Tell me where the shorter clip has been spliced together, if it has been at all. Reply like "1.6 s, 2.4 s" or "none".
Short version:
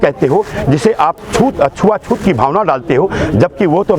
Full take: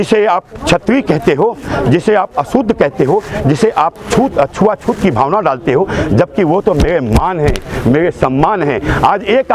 none